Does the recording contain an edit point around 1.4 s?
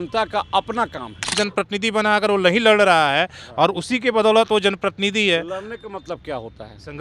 yes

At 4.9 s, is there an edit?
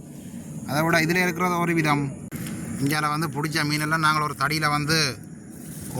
no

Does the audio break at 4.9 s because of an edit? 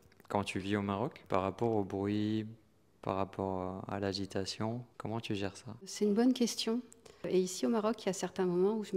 yes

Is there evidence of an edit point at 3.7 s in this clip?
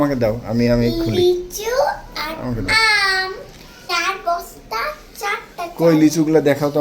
yes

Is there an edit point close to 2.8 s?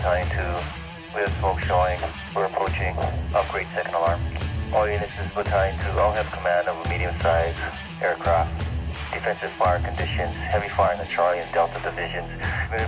yes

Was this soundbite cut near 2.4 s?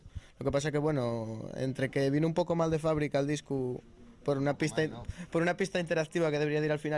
no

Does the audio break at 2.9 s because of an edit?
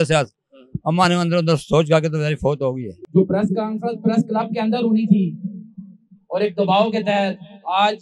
yes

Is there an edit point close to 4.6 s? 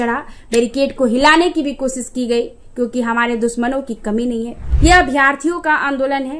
yes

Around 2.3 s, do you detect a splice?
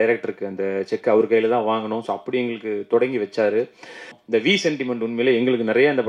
no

